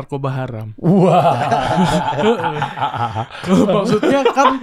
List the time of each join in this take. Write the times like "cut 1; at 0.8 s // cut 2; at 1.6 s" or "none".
none